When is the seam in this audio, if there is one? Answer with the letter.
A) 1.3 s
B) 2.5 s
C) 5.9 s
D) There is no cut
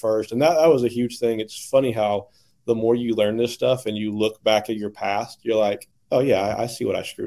C